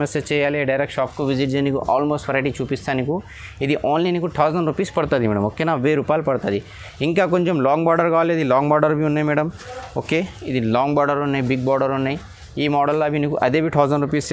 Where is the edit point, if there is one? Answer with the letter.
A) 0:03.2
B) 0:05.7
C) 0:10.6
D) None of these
D